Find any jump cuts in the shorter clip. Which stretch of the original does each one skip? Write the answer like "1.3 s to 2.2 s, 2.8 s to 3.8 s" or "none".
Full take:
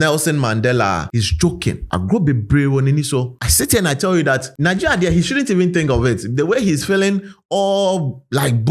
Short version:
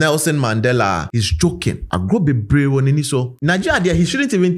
3.3 s to 4.5 s

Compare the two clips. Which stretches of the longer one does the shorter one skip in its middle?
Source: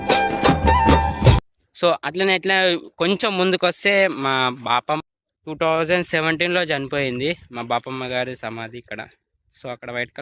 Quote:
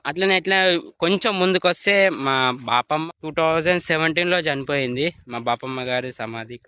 5.2 s to 5.4 s

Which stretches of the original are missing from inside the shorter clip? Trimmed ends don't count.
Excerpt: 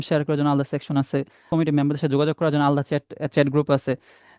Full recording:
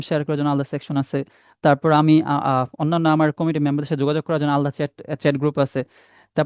1.5 s to 3.4 s

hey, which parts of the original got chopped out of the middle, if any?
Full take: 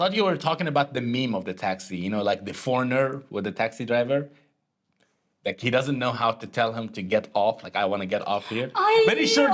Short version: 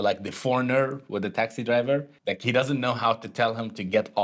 4.3 s to 5.3 s

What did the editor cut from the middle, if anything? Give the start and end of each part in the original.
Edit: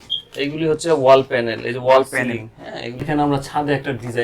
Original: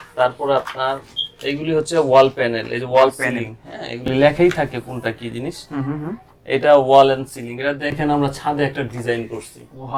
4.0 s to 7.8 s

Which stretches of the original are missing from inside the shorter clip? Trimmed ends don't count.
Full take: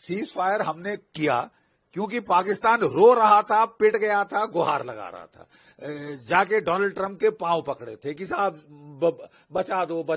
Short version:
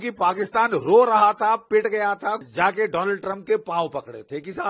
4.5 s to 6.1 s

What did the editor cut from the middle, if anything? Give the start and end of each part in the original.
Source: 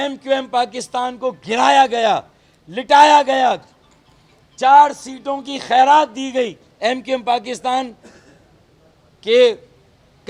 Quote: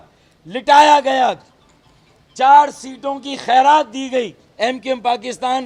none

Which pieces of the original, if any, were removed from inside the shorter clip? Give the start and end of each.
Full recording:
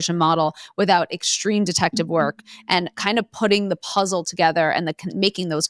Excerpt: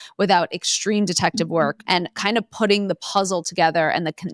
2.4 s to 2.6 s

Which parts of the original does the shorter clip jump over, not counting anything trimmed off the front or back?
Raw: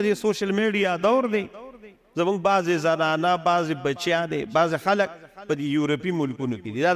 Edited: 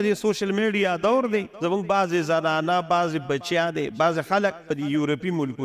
1.5 s to 2.1 s, 5.2 s to 5.4 s

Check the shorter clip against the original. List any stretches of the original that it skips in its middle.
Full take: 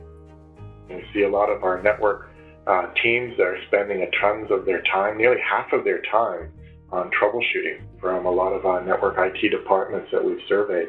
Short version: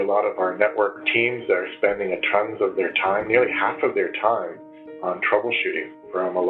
2.3 s to 2.9 s

